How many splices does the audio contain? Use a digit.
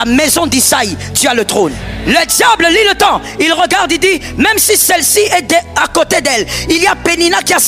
1